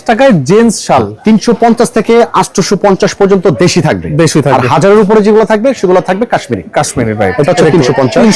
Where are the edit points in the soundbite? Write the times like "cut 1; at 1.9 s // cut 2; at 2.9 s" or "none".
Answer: none